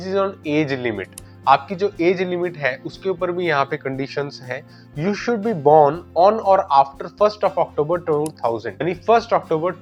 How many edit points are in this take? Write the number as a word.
zero